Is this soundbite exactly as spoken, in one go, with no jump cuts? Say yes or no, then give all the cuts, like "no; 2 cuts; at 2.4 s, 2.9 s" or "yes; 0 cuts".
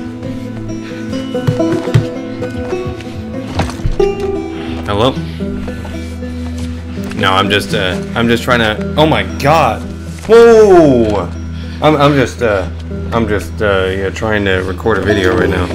yes; 0 cuts